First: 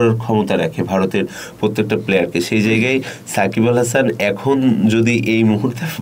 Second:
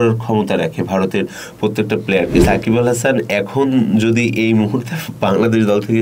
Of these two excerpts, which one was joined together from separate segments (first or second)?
second